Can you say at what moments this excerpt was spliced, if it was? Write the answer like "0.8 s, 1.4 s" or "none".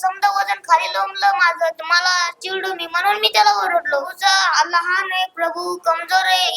4.1 s